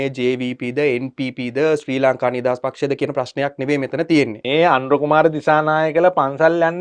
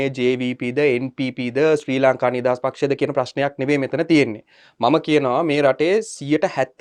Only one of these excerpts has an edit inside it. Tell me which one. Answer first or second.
first